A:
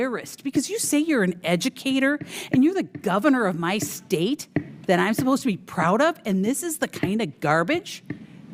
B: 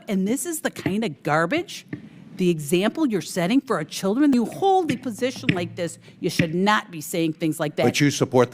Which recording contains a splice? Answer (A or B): B